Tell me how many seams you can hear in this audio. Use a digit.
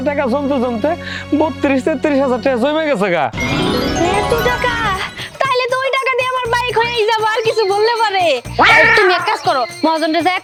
0